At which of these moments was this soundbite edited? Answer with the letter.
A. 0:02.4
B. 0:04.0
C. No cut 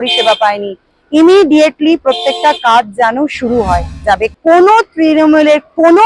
B